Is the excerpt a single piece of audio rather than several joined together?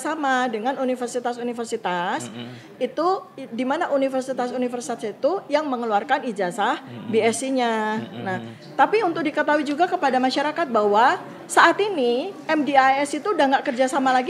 yes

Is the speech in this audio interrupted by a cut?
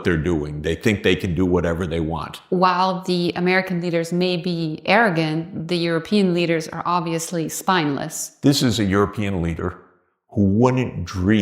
yes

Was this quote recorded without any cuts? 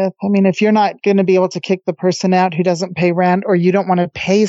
no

